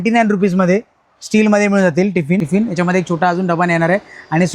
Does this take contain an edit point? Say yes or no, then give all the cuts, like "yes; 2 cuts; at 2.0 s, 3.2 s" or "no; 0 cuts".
yes; 1 cut; at 2.4 s